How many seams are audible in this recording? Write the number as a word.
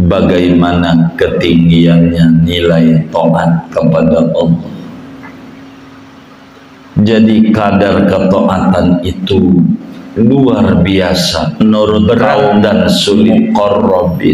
one